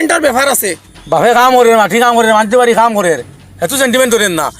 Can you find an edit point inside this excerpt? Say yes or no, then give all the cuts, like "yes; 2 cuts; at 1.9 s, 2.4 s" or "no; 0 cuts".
yes; 1 cut; at 0.9 s